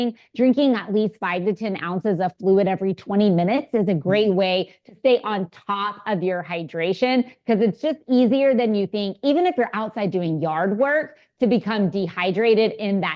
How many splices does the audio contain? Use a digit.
0